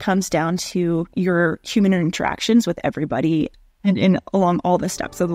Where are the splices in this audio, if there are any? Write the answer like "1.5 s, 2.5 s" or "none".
1.1 s, 3.5 s